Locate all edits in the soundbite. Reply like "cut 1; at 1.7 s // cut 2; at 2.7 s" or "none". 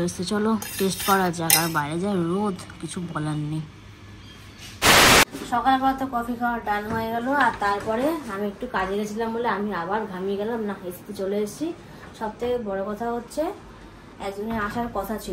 none